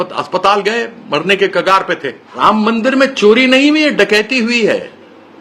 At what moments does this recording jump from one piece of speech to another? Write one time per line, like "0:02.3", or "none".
0:02.3